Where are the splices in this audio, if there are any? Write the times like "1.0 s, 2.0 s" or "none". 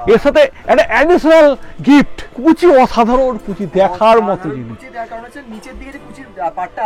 2.2 s